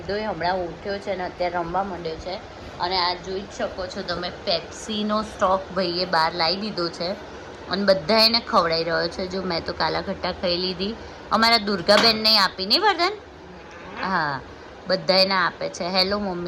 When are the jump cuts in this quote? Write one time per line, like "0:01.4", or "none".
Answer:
none